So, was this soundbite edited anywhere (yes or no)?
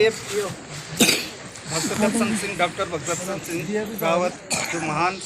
no